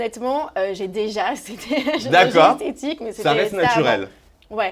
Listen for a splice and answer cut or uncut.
uncut